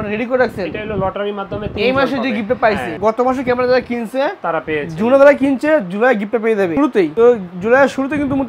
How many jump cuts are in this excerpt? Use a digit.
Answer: 0